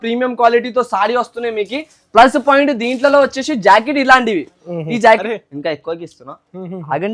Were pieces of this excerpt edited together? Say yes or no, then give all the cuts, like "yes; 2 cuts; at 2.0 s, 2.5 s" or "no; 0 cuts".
yes; 1 cut; at 5.2 s